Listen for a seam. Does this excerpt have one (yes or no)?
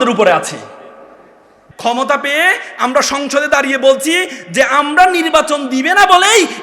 yes